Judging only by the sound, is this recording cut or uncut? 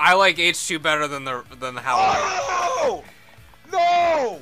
cut